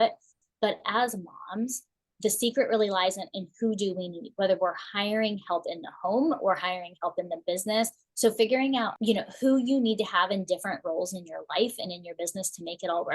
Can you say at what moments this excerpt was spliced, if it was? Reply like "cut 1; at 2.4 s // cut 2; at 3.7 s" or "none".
cut 1; at 8.0 s // cut 2; at 8.9 s